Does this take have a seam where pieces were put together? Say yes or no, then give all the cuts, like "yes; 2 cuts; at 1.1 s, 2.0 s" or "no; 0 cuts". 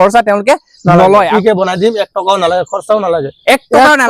yes; 1 cut; at 1.3 s